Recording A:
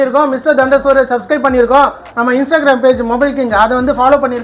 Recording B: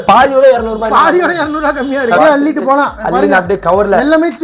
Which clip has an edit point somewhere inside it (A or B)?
B